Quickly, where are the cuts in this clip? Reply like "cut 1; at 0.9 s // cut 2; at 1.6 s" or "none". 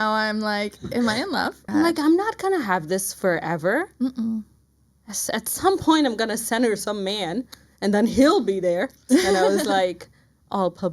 cut 1; at 1.6 s // cut 2; at 9.0 s

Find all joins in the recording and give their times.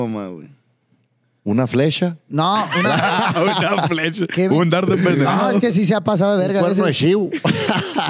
none

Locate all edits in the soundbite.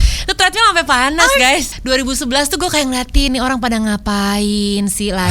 cut 1; at 1.7 s

